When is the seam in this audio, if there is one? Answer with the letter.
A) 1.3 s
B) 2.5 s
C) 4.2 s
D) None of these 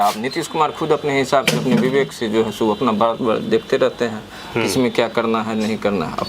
D